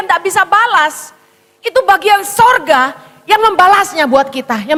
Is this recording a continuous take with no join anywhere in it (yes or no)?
yes